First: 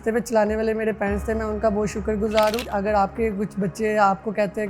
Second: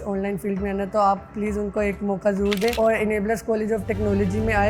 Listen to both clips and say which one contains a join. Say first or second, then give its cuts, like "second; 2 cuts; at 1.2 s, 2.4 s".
first; 1 cut; at 2.6 s